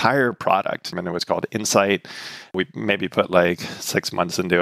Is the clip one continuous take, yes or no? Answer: no